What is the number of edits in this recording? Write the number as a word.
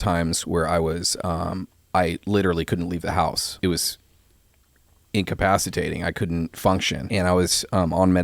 two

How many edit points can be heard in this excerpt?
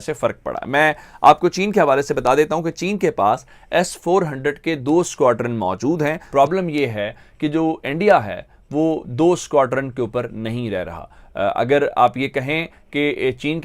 one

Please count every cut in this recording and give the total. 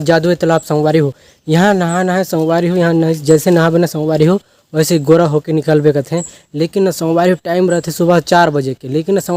zero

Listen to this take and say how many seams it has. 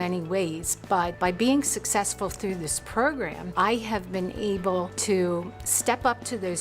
three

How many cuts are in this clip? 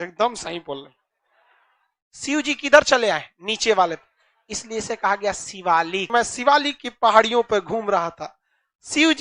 one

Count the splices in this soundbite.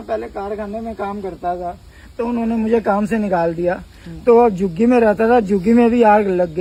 zero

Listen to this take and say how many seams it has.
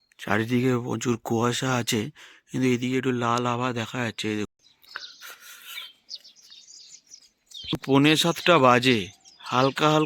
one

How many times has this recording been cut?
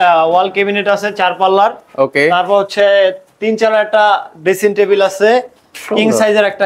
zero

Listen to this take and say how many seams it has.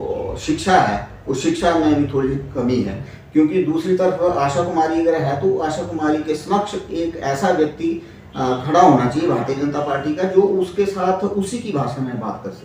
zero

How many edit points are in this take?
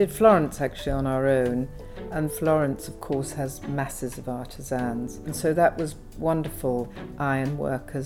three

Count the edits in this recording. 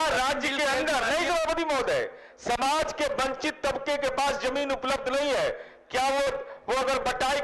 zero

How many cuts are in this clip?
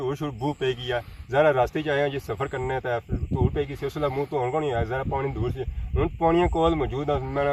zero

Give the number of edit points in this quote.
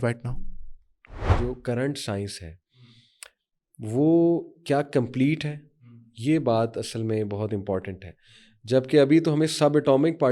one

